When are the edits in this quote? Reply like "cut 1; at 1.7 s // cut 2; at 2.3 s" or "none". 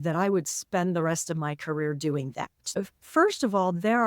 cut 1; at 2.7 s